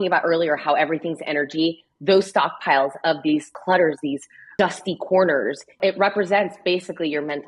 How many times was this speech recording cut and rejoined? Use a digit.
3